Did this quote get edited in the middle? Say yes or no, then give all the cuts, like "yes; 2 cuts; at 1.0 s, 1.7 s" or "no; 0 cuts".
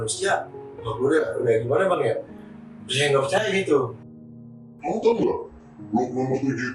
yes; 1 cut; at 4.2 s